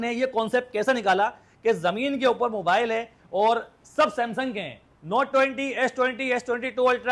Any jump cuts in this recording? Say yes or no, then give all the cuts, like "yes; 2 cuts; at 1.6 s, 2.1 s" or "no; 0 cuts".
no; 0 cuts